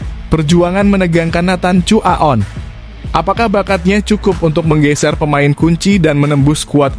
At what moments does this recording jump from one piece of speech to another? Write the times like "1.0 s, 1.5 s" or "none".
none